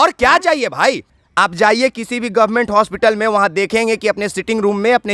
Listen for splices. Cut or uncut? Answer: cut